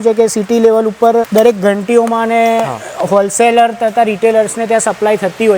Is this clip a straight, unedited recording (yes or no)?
no